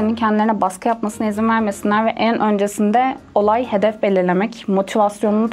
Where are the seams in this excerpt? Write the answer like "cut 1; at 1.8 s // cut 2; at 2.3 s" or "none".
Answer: none